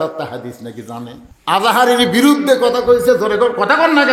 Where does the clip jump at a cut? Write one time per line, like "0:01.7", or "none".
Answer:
0:01.3

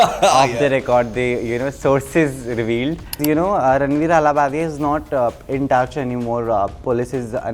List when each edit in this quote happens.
0:03.2

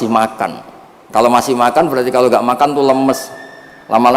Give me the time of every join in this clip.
none

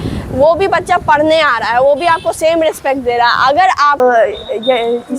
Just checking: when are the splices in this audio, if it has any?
0:04.0

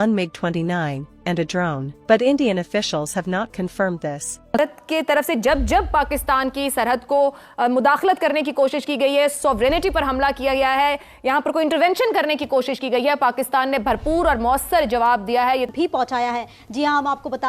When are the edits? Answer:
0:04.6
0:15.7

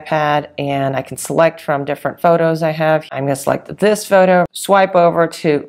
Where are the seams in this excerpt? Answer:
0:04.5

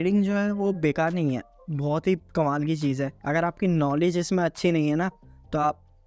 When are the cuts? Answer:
0:03.2

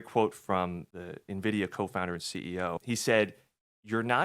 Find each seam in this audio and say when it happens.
0:00.9
0:02.8

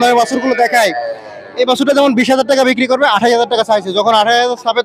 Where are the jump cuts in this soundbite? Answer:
none

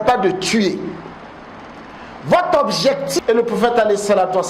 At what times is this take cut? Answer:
0:03.2

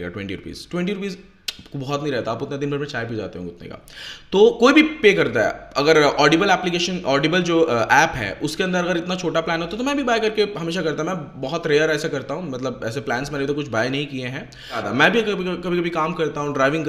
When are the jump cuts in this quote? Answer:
0:14.9

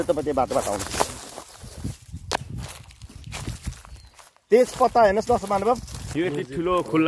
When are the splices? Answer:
0:05.9

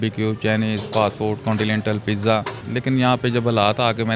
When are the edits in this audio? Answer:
0:02.6

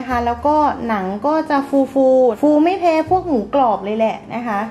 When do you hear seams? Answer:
0:02.4

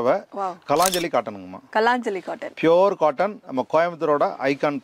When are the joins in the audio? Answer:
none

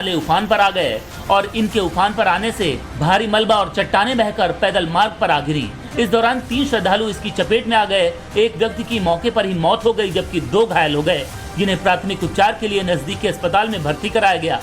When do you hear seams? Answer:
0:06.1

